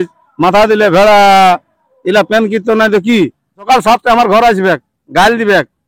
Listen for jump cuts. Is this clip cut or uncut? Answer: cut